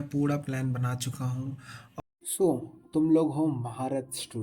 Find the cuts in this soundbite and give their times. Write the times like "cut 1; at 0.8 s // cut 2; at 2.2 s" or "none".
cut 1; at 2.0 s